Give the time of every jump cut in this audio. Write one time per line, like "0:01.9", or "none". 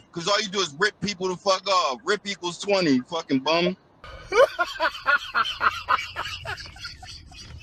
none